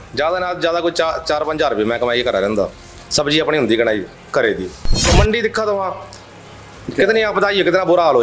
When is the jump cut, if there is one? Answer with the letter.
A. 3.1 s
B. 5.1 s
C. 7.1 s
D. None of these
B